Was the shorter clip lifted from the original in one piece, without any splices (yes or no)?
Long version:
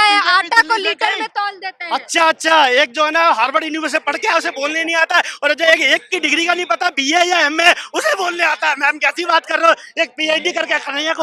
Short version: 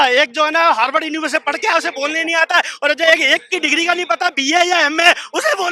yes